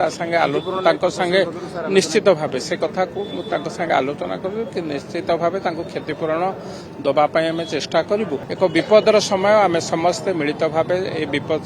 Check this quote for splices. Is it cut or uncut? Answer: cut